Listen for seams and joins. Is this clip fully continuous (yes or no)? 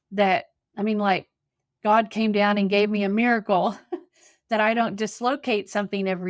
yes